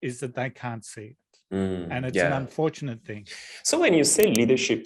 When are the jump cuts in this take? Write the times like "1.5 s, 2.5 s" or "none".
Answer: none